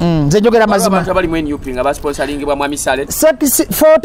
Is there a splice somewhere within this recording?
no; 0 cuts

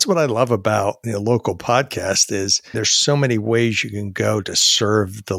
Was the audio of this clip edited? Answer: yes; 2 cuts; at 1.0 s, 2.6 s

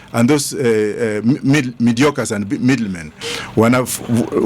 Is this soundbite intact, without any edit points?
no; 1 cut; at 3.1 s

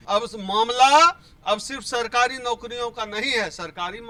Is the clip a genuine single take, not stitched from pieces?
yes; 0 cuts

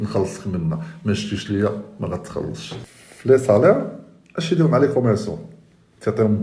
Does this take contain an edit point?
yes; 1 cut; at 2.7 s

